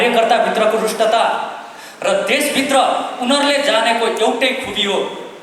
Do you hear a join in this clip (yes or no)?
no